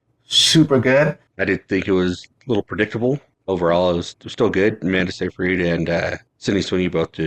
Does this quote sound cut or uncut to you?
cut